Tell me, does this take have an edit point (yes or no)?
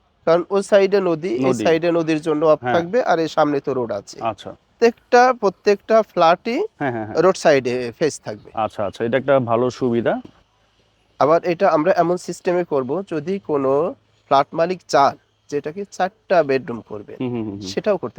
yes